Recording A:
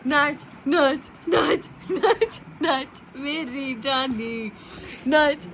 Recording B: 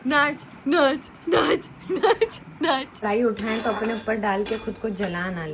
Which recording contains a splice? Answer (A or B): B